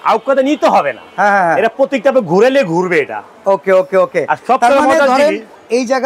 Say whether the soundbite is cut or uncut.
uncut